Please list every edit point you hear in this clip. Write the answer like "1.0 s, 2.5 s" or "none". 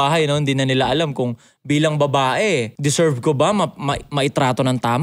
2.7 s